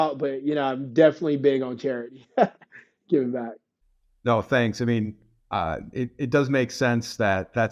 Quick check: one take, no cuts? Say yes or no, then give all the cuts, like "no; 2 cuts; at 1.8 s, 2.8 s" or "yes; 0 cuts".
yes; 0 cuts